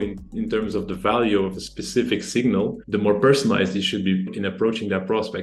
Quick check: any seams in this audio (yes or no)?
yes